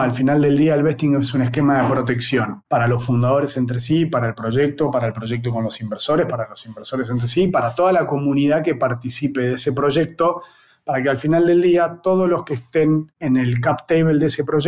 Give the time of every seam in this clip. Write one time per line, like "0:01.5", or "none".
0:02.6